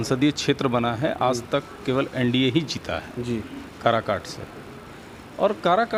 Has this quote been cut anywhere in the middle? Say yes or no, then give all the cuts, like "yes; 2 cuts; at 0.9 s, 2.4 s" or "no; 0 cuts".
no; 0 cuts